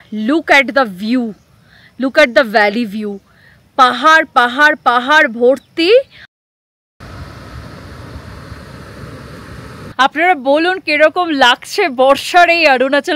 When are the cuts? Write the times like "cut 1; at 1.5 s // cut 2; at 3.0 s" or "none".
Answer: cut 1; at 7.0 s // cut 2; at 9.9 s